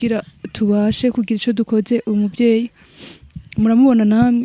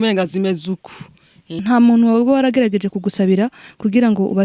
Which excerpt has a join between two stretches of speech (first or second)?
second